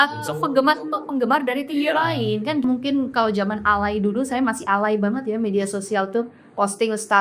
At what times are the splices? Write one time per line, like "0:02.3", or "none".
0:02.6